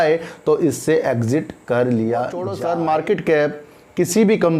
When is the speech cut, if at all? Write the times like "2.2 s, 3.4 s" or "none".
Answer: 2.5 s